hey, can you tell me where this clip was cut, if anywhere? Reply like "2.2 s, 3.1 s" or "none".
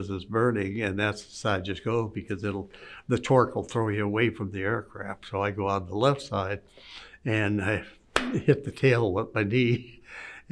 none